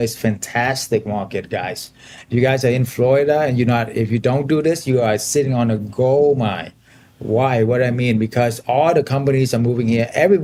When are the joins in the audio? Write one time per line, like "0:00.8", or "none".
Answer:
none